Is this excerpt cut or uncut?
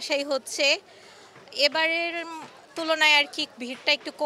uncut